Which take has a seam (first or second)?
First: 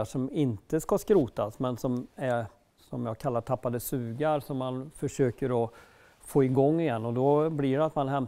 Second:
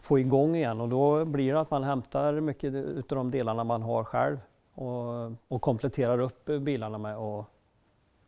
second